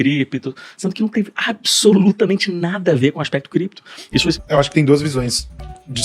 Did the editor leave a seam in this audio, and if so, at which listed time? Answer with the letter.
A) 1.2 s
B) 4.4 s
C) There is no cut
B